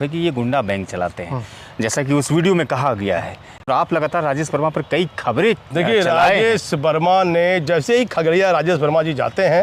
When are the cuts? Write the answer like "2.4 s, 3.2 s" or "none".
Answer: none